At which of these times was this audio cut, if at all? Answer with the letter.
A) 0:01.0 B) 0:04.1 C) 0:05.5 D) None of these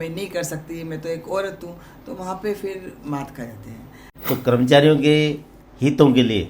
B